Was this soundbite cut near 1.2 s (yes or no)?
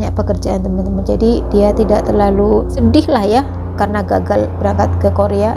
no